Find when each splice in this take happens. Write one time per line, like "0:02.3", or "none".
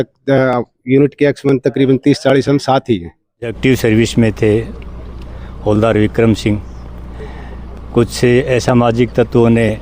0:03.5